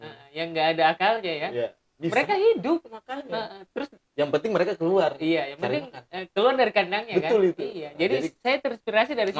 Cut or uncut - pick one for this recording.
uncut